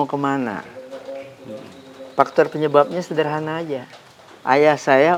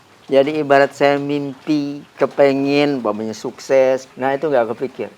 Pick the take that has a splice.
second; 1 cut; at 4.1 s

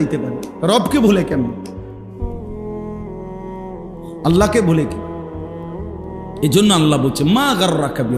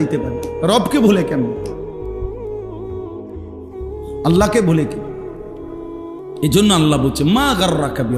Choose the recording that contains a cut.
second; 2 cuts; at 4.9 s, 6.4 s

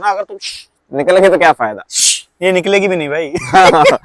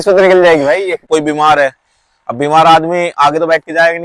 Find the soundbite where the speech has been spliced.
second; 1 cut; at 1.0 s

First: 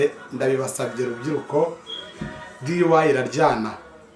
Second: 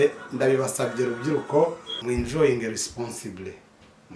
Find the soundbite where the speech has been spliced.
second; 1 cut; at 1.9 s

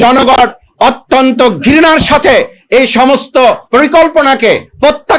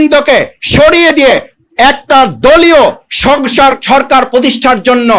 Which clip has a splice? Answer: first; 1 cut; at 3.6 s

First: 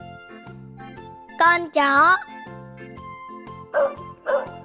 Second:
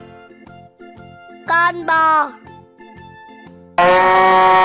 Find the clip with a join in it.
second; 2 cuts; at 2.3 s, 3.7 s

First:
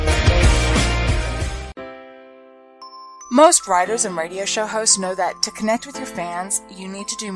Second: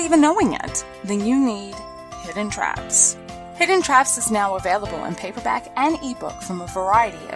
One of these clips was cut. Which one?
first; 1 cut; at 1.7 s

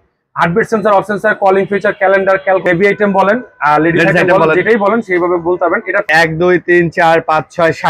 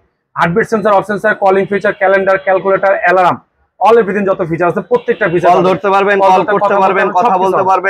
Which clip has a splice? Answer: first; 2 cuts; at 2.6 s, 6.1 s

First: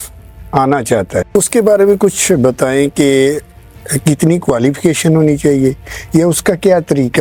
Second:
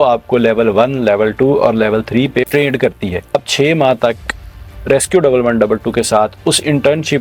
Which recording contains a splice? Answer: second; 1 cut; at 3.3 s

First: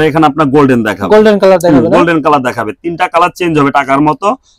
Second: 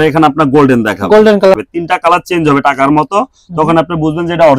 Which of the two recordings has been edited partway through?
second; 1 cut; at 1.4 s

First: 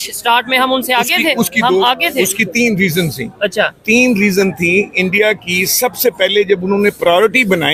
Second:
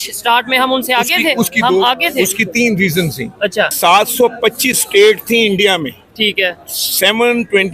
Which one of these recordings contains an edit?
second; 1 cut; at 3.7 s

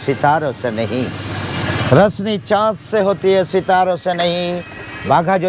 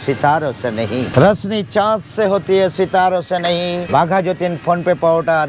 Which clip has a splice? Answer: second; 2 cuts; at 1.1 s, 3.8 s

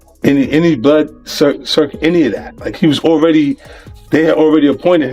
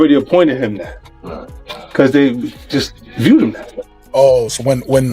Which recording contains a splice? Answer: second; 1 cut; at 3.7 s

